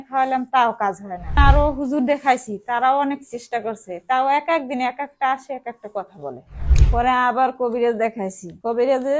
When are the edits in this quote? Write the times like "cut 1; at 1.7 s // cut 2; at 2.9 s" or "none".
cut 1; at 1.4 s // cut 2; at 6.6 s

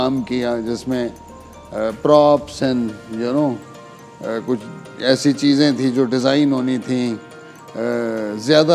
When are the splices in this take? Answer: none

